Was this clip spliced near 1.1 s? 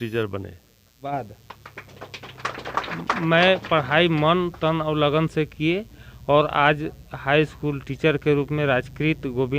yes; 1 cut; at 1.1 s

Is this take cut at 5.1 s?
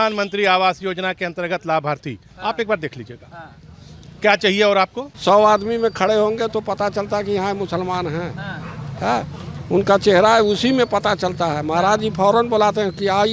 yes; 1 cut; at 5.1 s

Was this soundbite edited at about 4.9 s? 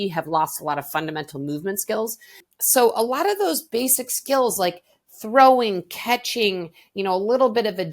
no; 1 cut; at 2.4 s

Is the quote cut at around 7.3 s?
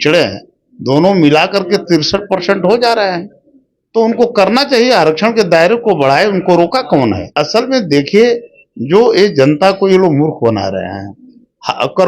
yes; 1 cut; at 7.3 s

